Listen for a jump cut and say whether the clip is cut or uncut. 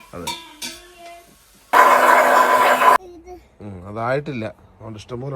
cut